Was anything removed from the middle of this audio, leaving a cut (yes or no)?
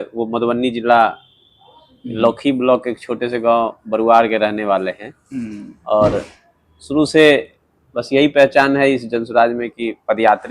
no